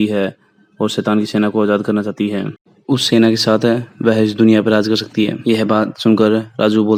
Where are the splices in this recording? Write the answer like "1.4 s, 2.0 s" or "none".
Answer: none